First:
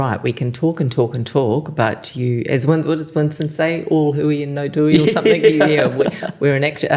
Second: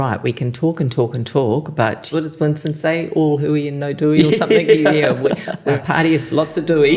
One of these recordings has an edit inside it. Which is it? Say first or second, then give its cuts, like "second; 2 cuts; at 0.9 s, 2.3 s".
second; 2 cuts; at 2.1 s, 5.8 s